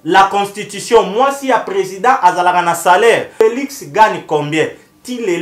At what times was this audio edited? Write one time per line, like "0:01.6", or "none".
0:03.3